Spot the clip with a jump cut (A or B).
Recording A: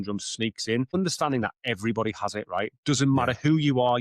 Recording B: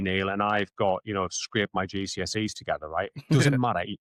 A